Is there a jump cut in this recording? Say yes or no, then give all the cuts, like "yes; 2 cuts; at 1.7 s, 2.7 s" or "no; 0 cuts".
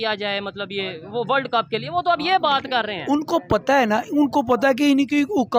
no; 0 cuts